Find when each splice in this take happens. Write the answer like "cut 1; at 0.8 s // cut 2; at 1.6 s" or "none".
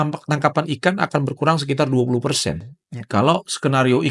none